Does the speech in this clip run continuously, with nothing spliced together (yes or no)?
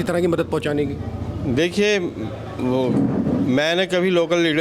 yes